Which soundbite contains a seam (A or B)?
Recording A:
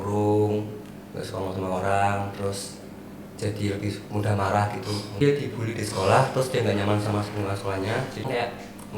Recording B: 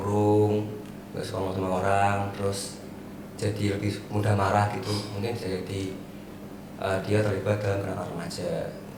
A